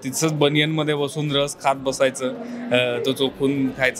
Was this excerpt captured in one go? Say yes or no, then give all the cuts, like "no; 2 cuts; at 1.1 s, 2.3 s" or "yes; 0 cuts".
yes; 0 cuts